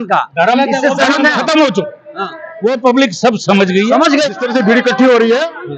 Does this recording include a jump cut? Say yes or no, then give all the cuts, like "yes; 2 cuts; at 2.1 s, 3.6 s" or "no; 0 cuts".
yes; 1 cut; at 4.3 s